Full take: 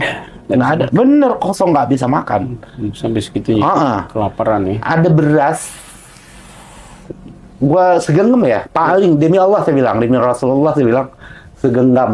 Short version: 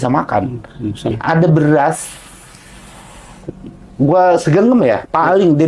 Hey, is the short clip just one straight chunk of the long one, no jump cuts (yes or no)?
no